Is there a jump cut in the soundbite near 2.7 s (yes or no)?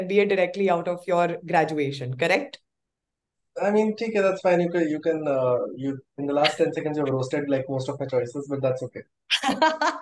no